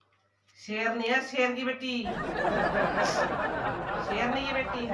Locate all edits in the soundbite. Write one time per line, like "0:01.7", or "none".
none